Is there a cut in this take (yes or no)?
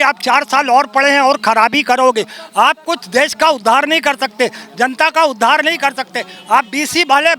no